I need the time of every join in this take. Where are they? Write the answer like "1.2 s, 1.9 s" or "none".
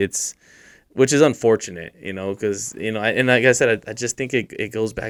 none